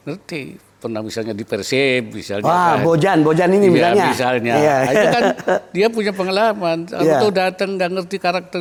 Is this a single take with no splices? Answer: yes; 0 cuts

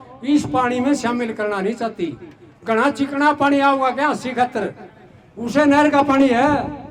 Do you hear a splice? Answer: no; 0 cuts

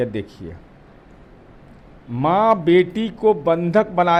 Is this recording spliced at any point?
no; 0 cuts

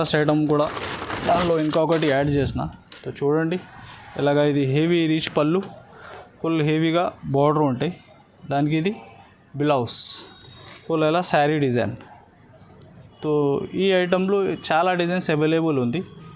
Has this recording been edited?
no; 0 cuts

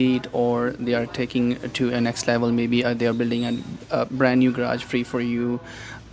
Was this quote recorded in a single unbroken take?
yes; 0 cuts

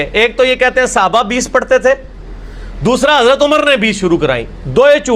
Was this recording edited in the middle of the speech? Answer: no; 0 cuts

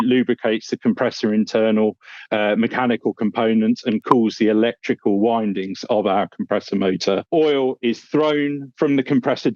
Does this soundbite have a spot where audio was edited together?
yes; 1 cut; at 7.2 s

